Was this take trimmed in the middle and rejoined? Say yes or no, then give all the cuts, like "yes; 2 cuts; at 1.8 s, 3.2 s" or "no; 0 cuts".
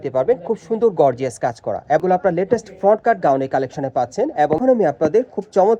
yes; 2 cuts; at 2.0 s, 4.6 s